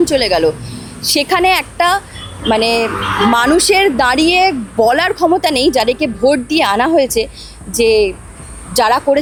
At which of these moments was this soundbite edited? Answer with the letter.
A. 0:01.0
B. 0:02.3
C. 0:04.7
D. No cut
D